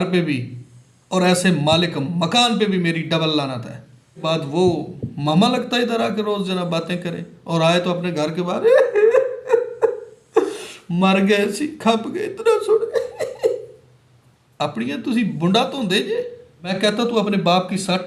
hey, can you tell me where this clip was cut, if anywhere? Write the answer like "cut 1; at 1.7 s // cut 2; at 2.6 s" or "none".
cut 1; at 4.2 s // cut 2; at 16.7 s